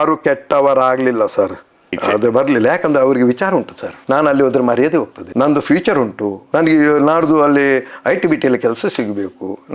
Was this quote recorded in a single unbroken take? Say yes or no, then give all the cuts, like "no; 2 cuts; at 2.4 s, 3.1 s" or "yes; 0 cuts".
yes; 0 cuts